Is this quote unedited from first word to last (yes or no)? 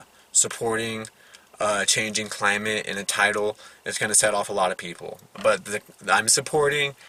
yes